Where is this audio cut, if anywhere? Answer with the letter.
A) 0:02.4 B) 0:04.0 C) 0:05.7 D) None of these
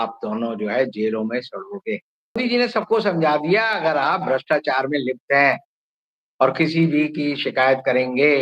A